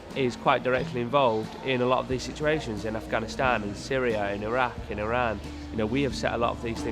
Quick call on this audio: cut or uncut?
uncut